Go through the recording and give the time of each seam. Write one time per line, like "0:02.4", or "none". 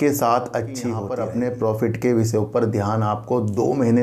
0:01.0